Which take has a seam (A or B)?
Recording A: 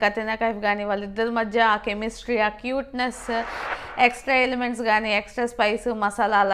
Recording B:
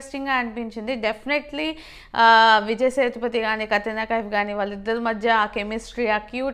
A